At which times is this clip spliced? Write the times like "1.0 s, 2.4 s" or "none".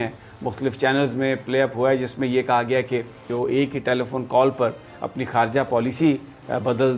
3.3 s